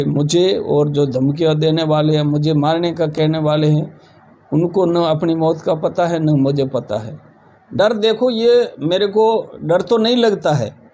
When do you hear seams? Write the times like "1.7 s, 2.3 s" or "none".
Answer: 7.8 s